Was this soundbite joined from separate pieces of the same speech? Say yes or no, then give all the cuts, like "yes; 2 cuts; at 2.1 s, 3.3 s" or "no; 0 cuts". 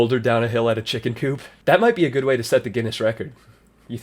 yes; 1 cut; at 1.5 s